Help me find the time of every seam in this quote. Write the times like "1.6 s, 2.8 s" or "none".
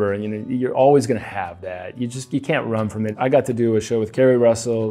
3.1 s